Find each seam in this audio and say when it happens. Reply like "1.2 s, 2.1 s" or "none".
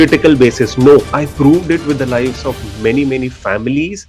1.2 s